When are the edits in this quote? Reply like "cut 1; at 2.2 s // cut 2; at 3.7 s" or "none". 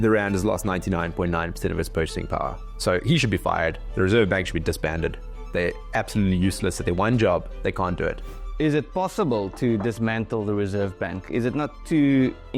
cut 1; at 8.3 s